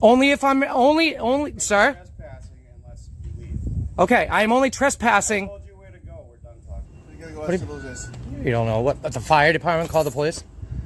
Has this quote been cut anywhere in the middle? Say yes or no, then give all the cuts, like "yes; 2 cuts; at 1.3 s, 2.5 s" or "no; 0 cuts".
yes; 1 cut; at 6.9 s